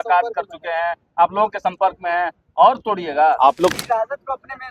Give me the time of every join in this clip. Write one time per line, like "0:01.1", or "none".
0:03.7